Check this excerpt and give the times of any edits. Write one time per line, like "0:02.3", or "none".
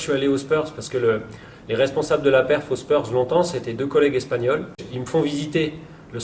0:04.9